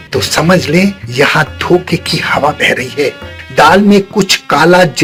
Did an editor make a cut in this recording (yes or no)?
no